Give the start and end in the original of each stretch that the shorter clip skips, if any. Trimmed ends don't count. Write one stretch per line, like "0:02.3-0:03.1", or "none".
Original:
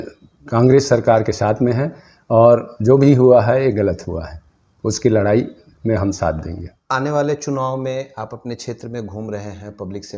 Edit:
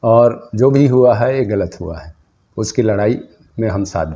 none